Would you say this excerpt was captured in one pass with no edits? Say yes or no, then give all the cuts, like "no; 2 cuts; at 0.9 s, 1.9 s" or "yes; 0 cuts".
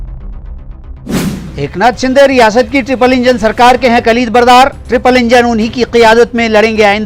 no; 1 cut; at 1.4 s